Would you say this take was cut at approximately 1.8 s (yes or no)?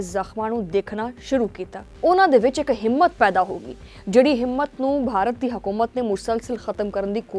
yes